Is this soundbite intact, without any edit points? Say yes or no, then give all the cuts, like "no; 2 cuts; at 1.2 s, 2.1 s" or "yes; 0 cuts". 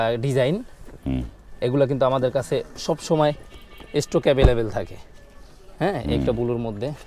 yes; 0 cuts